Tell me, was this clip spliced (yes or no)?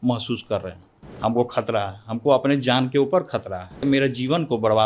yes